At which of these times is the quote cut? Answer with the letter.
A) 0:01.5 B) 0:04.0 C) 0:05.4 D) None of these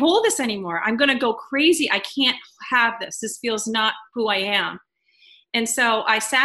B